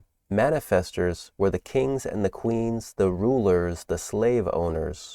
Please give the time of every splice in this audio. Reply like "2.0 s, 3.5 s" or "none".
none